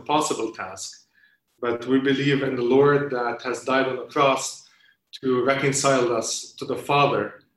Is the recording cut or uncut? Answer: uncut